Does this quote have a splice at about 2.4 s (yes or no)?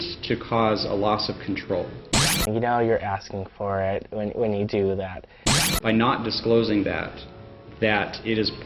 yes